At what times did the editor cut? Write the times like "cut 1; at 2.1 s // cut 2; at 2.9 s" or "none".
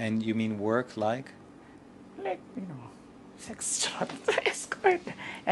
none